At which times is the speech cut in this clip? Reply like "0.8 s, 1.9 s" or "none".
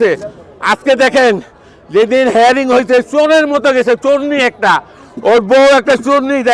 none